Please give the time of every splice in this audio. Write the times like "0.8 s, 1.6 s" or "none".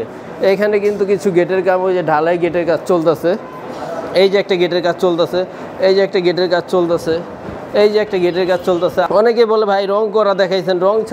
9.1 s